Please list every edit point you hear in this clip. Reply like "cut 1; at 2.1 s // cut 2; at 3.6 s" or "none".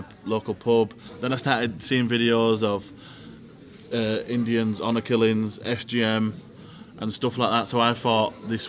cut 1; at 1.1 s